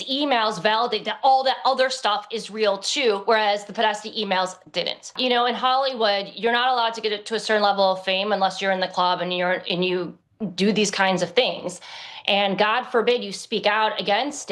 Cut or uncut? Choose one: cut